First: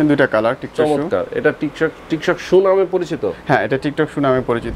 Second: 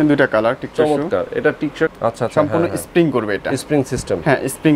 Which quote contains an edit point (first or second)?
second